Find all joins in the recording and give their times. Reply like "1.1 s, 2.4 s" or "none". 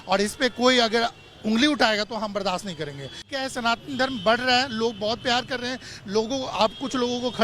3.3 s